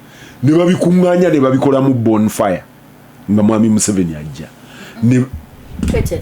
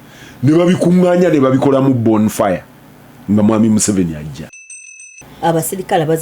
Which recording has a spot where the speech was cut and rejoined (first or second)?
second